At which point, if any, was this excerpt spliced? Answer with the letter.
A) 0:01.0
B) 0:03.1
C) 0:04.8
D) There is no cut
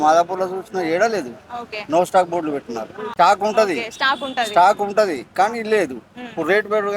B